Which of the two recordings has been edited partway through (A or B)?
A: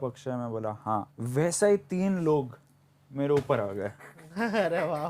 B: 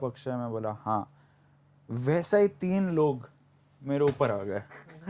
A